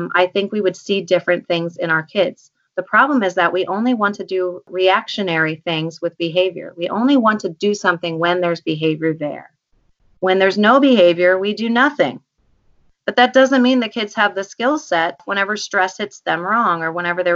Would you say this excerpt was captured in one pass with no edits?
no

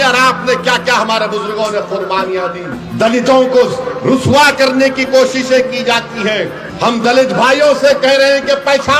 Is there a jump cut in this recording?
yes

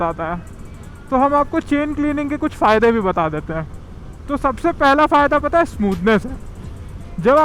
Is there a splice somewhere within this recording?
no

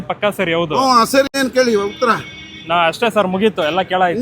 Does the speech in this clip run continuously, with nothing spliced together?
no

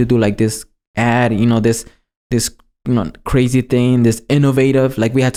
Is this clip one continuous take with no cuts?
yes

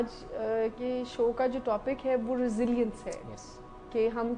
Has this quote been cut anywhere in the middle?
no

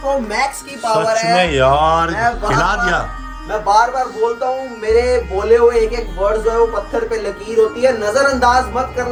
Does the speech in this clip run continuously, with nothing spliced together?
yes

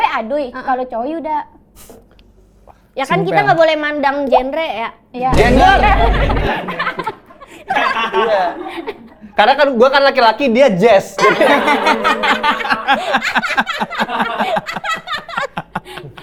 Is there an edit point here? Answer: no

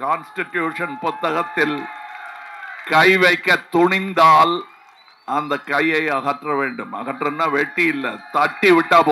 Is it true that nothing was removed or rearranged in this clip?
yes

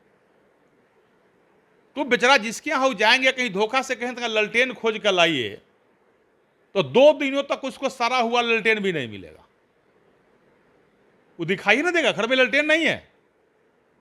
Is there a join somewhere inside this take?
no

